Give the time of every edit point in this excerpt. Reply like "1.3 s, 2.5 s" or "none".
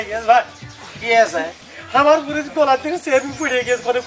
none

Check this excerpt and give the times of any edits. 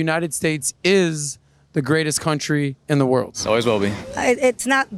none

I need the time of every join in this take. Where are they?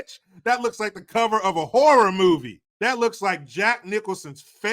2.6 s

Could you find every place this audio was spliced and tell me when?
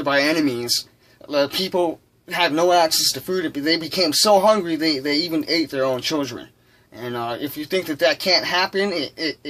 none

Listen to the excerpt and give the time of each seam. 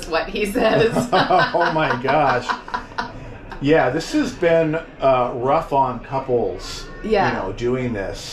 none

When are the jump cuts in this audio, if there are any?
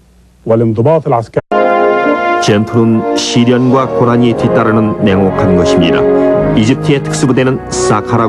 none

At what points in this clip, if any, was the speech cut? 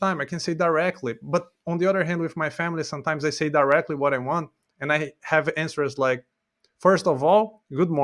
none

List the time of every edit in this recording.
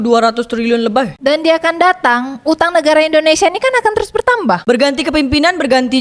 none

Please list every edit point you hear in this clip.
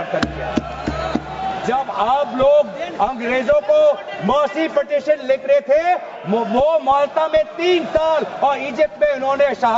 1.5 s

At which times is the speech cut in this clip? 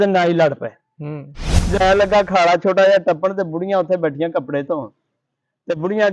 1.8 s

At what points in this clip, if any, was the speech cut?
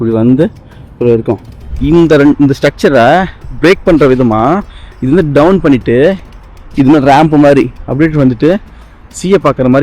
1.7 s

